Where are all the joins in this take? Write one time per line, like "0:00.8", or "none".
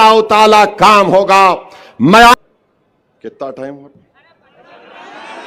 0:02.3